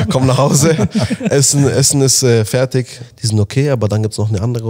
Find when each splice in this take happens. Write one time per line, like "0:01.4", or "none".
0:03.1